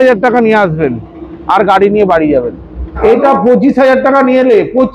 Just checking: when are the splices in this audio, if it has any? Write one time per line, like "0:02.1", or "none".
0:02.9